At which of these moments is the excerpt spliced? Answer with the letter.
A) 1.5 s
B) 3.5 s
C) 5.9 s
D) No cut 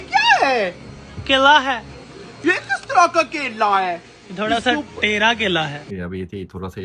C